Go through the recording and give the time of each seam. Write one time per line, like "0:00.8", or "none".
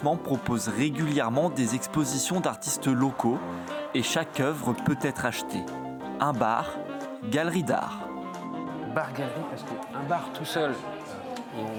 none